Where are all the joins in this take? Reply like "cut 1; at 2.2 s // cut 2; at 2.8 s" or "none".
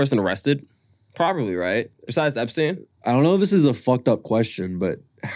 cut 1; at 2.9 s